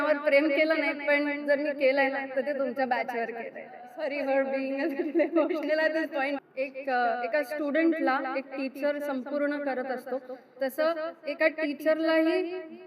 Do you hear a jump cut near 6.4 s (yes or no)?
yes